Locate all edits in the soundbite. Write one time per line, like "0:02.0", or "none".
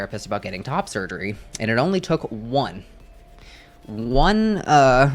none